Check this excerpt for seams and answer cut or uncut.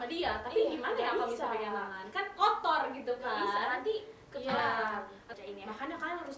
cut